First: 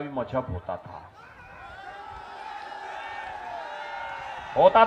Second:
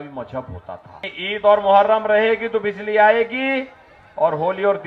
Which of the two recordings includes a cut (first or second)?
second